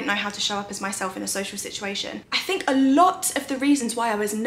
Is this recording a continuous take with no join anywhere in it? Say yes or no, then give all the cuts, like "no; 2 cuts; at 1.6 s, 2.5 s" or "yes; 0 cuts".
no; 1 cut; at 2.1 s